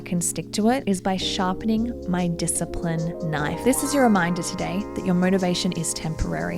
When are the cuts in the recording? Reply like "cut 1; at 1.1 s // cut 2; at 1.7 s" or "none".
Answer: cut 1; at 3.6 s